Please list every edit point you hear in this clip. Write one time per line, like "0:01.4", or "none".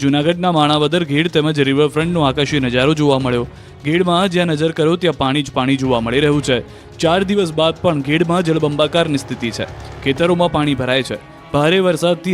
0:07.1